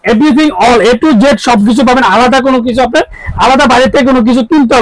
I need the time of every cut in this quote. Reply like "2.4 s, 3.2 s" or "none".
none